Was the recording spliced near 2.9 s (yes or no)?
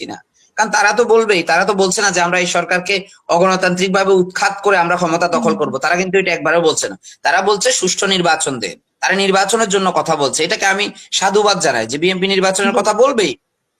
no